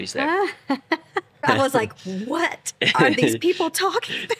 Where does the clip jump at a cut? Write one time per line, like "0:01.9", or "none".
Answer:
0:01.4